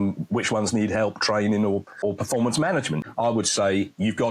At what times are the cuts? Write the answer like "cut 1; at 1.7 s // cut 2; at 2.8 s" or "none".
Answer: cut 1; at 1.9 s // cut 2; at 3.0 s